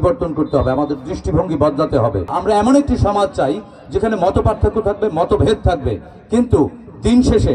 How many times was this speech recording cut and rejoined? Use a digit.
1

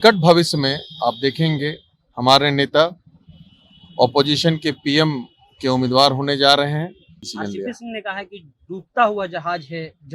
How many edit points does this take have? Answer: 1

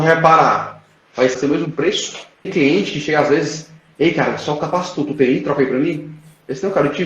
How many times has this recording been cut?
2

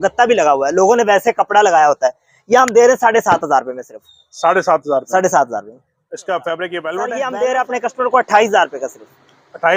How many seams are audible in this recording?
1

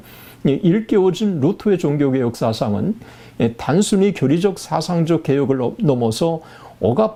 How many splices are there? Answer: 0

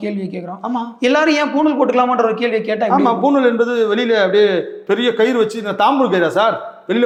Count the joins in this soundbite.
0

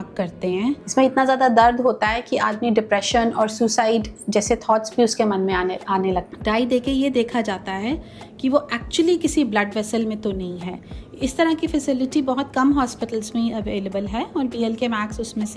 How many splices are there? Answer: 2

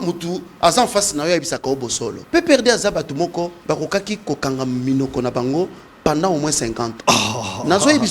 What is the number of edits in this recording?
3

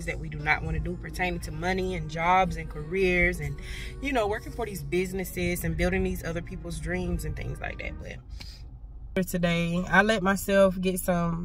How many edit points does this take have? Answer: 1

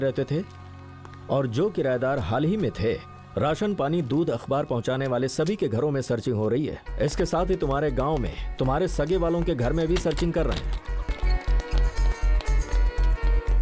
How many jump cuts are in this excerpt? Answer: 1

